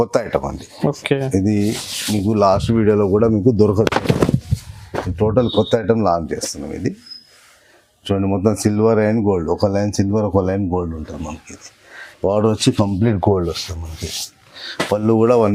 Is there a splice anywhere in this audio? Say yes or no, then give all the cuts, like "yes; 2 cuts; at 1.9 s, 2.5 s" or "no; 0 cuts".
no; 0 cuts